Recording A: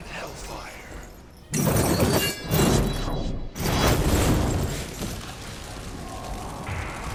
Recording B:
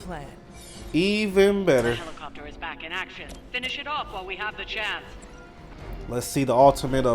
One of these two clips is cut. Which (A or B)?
B